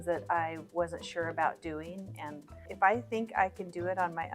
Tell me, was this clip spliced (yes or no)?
yes